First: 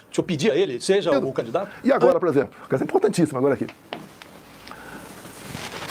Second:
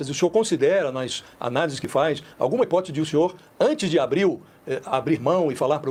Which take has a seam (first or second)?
first